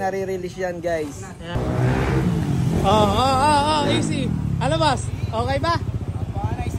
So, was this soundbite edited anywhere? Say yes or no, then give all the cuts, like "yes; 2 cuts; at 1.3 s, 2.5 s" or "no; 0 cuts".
yes; 1 cut; at 1.5 s